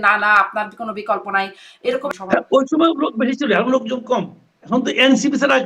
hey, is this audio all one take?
no; 1 cut; at 2.1 s

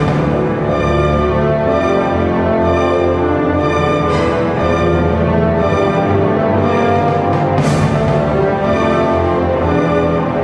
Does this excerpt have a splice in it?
no; 0 cuts

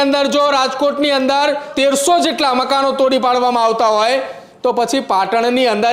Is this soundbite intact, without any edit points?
no; 1 cut; at 1.7 s

